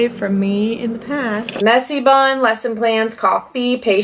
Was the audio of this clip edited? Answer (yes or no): yes